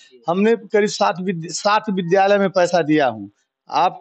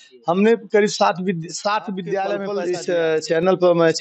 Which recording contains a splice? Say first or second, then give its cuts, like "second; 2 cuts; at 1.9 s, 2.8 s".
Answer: second; 1 cut; at 2.5 s